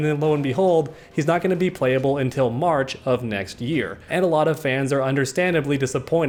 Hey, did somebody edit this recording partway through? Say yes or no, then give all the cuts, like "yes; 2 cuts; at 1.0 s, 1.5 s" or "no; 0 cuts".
no; 0 cuts